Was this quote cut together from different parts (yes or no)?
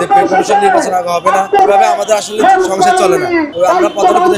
yes